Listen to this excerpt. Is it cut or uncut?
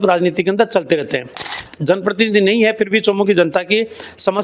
cut